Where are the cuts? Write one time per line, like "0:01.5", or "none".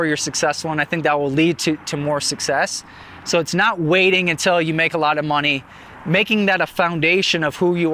none